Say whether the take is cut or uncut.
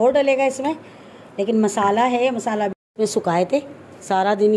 cut